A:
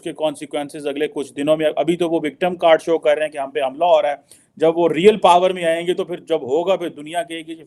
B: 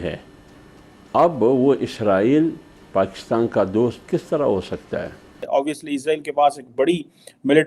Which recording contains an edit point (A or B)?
B